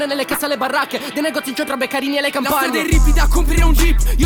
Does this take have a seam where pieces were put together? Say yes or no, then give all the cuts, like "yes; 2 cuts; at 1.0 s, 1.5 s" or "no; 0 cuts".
no; 0 cuts